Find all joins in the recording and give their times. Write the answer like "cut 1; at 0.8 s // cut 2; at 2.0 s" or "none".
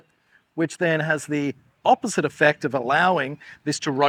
none